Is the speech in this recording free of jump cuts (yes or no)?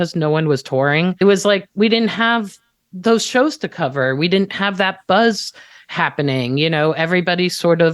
no